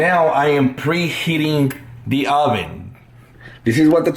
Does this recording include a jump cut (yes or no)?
no